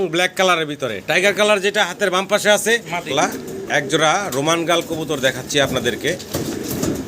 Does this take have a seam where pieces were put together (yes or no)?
yes